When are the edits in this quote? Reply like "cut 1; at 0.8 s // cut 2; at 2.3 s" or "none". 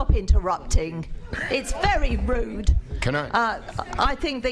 cut 1; at 2.7 s